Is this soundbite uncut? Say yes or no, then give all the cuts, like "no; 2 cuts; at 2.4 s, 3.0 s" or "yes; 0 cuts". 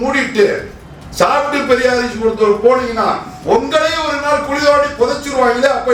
yes; 0 cuts